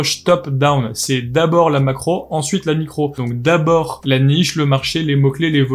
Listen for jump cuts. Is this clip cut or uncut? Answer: uncut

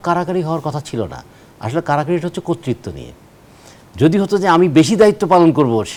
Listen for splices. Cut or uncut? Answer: uncut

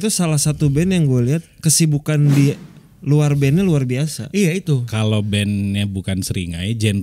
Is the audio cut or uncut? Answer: cut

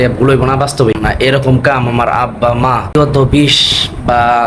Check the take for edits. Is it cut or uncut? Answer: cut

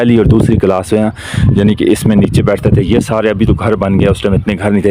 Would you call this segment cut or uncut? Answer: uncut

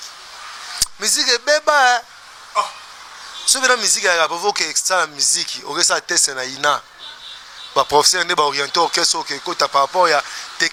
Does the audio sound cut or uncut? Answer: uncut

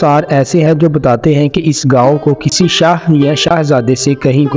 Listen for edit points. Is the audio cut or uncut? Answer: uncut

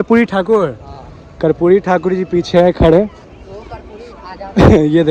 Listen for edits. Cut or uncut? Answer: uncut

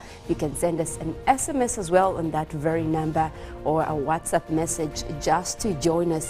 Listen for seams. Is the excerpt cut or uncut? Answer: cut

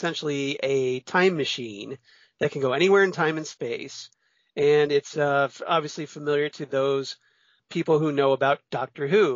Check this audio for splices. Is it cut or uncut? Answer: cut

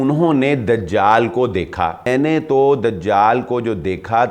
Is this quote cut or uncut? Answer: cut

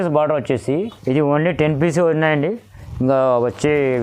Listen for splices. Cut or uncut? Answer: cut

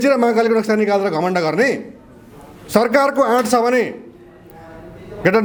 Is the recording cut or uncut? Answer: uncut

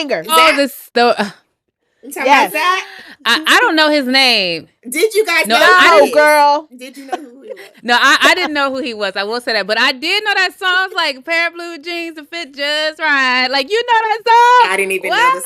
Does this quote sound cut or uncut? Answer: uncut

